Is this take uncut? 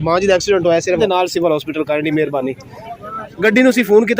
no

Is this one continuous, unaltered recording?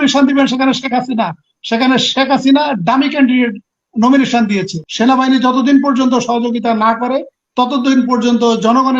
no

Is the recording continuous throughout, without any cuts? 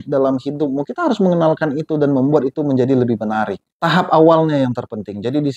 yes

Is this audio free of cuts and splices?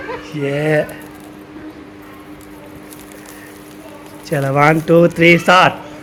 yes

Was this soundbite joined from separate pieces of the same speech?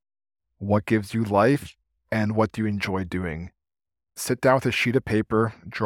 yes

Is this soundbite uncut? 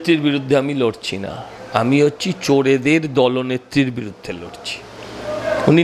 yes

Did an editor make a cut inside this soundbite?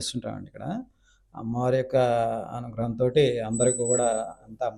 no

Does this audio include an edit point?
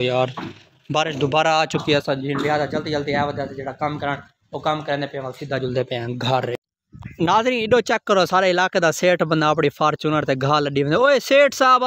yes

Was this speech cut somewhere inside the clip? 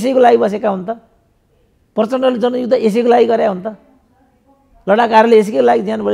no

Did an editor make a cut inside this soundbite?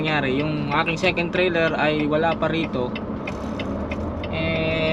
no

